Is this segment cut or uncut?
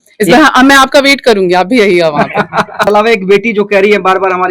cut